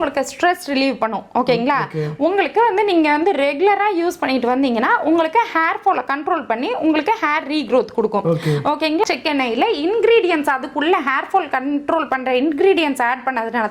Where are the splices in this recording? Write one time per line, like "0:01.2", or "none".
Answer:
0:09.1